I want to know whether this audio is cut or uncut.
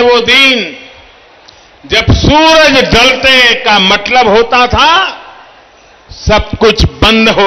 uncut